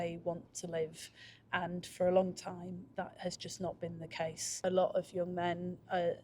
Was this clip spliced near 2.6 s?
no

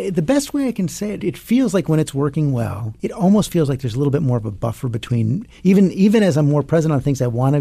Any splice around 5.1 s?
no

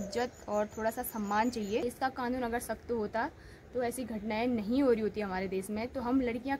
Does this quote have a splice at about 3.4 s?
no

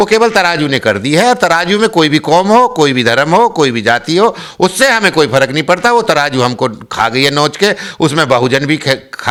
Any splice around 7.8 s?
no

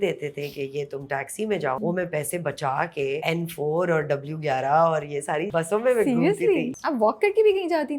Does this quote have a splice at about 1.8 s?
yes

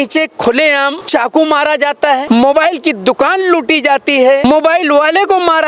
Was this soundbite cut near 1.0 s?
yes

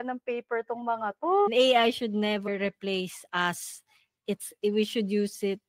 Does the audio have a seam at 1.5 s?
yes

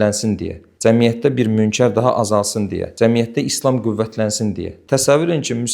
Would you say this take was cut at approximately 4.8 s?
yes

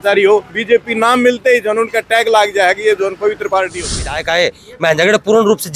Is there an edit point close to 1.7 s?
no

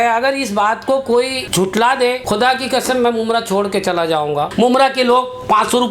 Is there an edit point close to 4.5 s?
yes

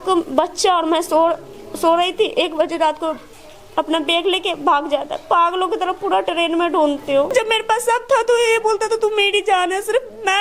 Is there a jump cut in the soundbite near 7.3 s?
yes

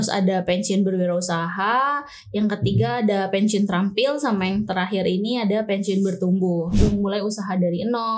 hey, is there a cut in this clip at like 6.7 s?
yes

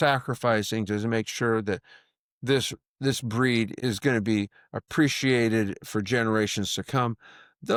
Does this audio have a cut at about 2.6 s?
no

